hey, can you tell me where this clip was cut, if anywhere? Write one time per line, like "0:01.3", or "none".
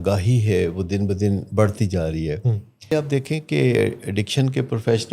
0:02.9